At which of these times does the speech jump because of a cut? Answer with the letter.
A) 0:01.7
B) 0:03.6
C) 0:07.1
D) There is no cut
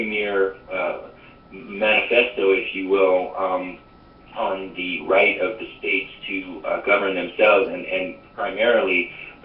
A